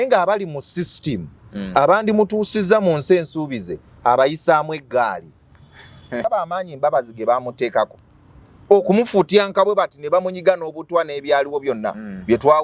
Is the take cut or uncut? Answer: cut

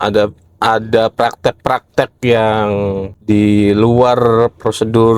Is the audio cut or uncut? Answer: cut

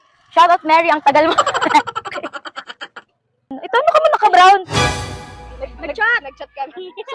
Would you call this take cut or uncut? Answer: cut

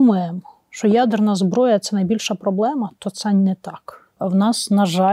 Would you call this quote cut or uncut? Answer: cut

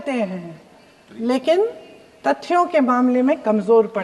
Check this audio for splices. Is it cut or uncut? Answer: uncut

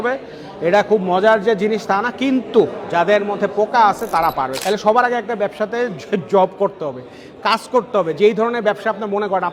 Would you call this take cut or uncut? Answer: cut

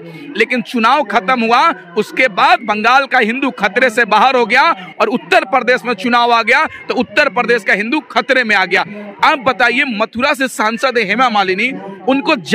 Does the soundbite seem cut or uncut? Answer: uncut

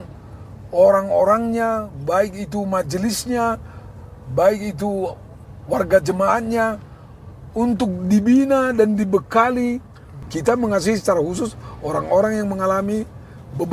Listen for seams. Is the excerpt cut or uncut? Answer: cut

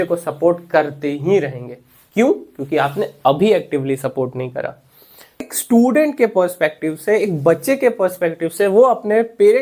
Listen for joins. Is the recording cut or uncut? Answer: cut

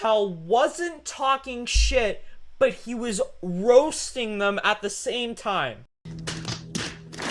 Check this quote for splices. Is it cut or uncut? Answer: uncut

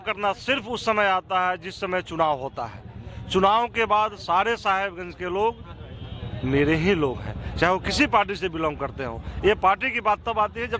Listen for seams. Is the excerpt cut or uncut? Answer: uncut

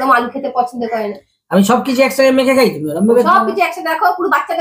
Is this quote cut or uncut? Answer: uncut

